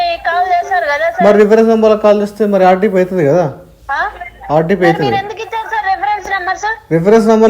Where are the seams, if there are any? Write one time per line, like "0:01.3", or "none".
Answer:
none